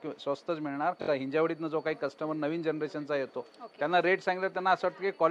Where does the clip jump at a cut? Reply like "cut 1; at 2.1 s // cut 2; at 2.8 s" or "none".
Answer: cut 1; at 1.0 s

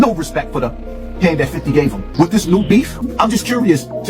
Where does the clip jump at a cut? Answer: cut 1; at 2.0 s // cut 2; at 3.0 s

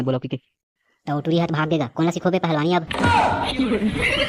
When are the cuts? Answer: cut 1; at 3.2 s

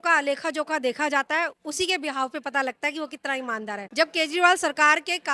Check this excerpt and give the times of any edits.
none

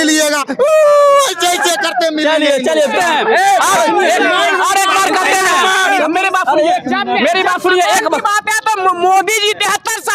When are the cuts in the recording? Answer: cut 1; at 2.9 s

